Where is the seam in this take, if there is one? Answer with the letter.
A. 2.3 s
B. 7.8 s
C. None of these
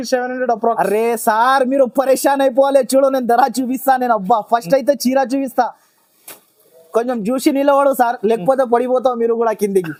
C